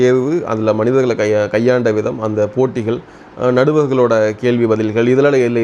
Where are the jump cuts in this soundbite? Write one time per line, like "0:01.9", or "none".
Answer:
none